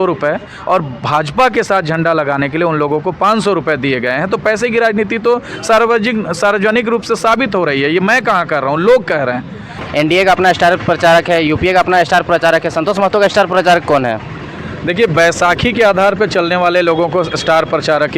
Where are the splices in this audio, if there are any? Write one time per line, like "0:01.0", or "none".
0:09.8